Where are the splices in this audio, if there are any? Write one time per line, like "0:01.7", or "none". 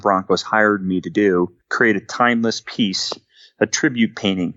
0:01.6